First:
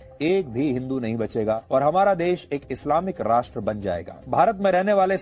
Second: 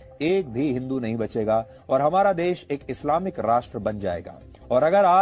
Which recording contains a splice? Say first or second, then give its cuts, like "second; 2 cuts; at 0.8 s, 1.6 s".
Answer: first; 2 cuts; at 1.6 s, 4.2 s